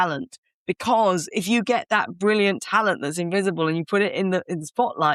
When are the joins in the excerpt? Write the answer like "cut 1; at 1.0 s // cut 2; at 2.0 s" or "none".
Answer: none